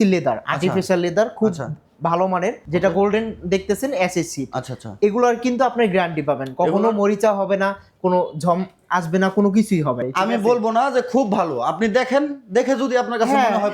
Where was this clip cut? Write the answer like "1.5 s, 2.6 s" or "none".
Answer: 2.6 s, 10.0 s